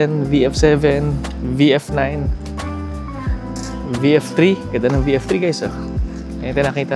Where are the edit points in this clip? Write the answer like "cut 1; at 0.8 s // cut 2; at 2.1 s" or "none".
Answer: cut 1; at 2.3 s // cut 2; at 3.8 s